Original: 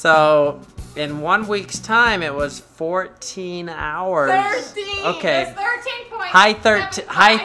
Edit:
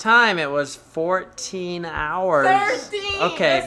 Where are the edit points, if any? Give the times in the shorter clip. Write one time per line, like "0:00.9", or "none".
none